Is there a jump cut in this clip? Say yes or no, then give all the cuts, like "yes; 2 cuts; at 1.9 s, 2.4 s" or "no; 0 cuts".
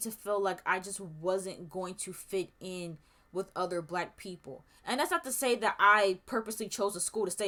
no; 0 cuts